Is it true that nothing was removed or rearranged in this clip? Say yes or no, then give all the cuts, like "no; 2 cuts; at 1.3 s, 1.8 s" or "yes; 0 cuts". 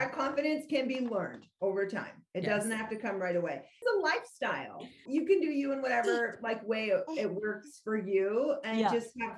no; 2 cuts; at 3.8 s, 5.0 s